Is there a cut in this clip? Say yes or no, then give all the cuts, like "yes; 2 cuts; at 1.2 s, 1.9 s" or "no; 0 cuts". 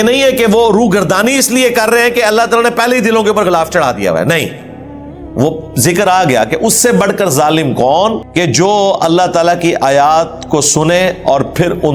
yes; 1 cut; at 8.2 s